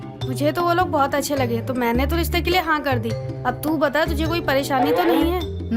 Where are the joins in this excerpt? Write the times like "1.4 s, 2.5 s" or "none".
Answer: none